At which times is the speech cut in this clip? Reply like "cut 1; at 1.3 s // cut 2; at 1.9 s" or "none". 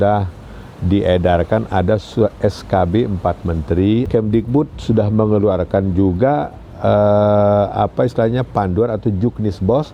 cut 1; at 4.1 s